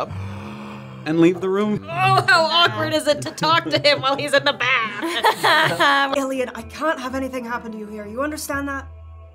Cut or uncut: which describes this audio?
cut